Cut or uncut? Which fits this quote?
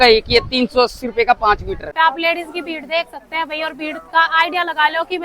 cut